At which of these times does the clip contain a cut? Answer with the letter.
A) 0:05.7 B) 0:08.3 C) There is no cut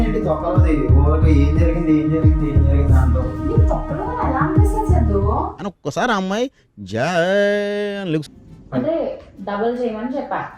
B